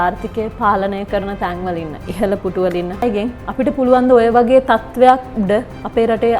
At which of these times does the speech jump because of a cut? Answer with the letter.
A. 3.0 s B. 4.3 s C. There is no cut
A